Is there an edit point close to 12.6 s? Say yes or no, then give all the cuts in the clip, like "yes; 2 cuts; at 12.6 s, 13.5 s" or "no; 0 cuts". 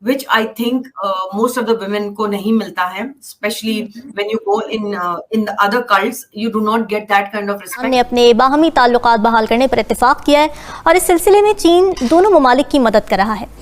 no; 1 cut; at 7.8 s